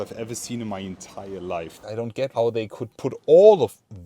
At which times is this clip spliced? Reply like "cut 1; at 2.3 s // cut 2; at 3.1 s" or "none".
cut 1; at 1.7 s